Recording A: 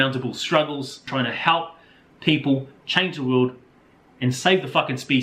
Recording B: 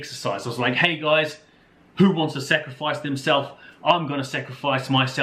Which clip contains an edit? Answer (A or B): A